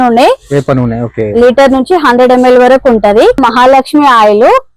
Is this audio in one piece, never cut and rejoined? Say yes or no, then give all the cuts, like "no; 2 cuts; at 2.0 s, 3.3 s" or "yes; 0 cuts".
no; 1 cut; at 3.4 s